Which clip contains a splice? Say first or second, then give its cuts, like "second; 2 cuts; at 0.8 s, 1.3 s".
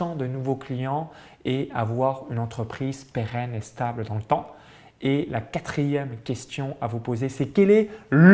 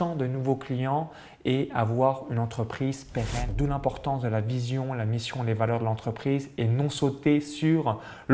second; 1 cut; at 3.5 s